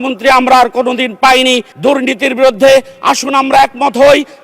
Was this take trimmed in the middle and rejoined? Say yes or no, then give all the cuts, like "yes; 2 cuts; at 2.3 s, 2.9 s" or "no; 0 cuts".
yes; 1 cut; at 1.7 s